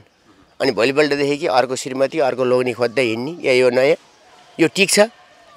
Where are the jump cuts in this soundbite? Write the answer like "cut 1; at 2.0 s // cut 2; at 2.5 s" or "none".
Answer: none